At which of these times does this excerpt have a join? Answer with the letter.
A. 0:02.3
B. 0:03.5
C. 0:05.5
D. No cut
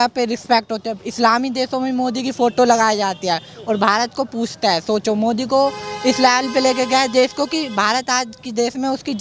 D